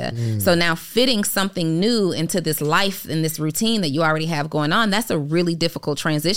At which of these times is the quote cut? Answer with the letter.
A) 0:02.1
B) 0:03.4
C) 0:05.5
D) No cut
B